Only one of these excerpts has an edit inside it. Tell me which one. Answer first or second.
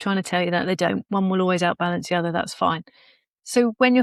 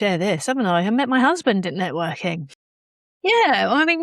second